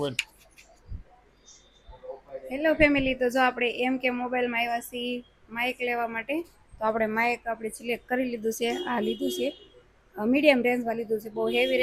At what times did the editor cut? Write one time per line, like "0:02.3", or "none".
none